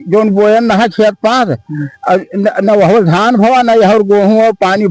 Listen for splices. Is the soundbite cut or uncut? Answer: uncut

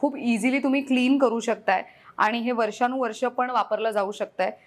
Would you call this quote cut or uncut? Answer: uncut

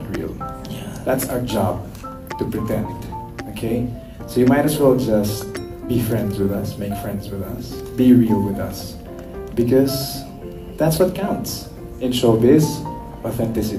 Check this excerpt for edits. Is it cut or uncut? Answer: uncut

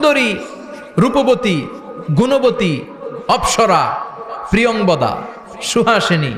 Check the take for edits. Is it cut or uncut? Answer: uncut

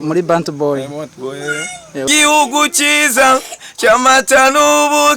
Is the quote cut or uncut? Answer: cut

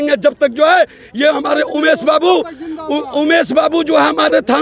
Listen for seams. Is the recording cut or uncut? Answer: uncut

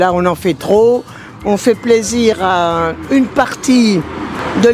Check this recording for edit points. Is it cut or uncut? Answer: uncut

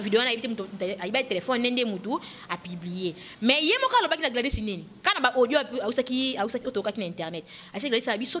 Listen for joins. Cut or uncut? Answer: uncut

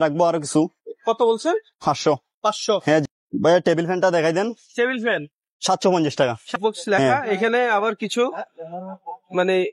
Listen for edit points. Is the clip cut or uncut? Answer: cut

